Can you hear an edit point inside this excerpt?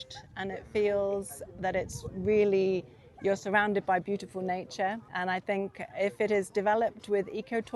yes; 1 cut; at 5.1 s

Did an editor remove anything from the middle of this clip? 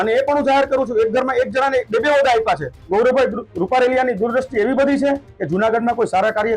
yes; 1 cut; at 2.8 s

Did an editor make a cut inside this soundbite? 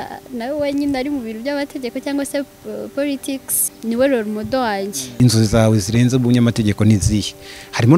yes; 2 cuts; at 3.7 s, 5.2 s

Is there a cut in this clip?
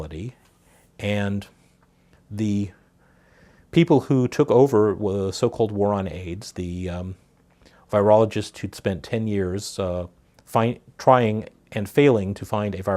yes; 1 cut; at 11.2 s

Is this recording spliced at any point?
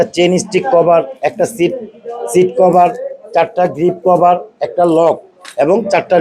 no; 0 cuts

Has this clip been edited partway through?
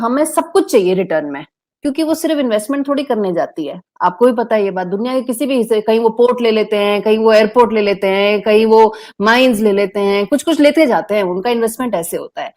no; 0 cuts

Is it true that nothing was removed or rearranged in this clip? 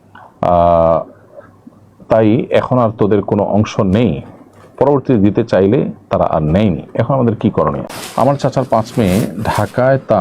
no; 1 cut; at 7.8 s

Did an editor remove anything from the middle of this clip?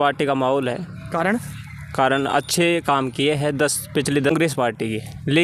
yes; 1 cut; at 4.3 s

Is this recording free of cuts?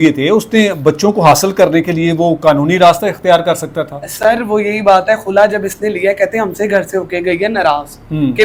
yes; 0 cuts

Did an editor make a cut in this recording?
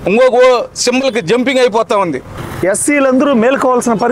yes; 1 cut; at 2.3 s

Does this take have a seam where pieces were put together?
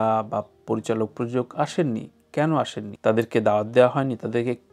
yes; 1 cut; at 2.8 s

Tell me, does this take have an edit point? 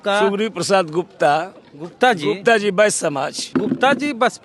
yes; 1 cut; at 3.4 s

